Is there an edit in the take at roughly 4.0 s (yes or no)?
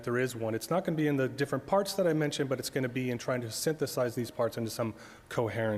yes